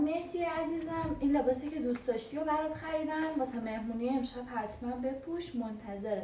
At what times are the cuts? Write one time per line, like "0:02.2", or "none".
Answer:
none